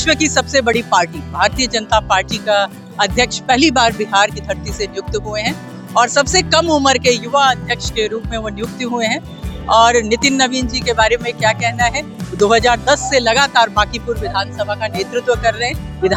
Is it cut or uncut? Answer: uncut